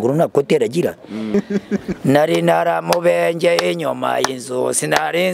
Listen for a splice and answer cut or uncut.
cut